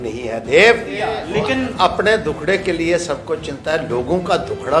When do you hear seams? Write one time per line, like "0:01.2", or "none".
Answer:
0:01.2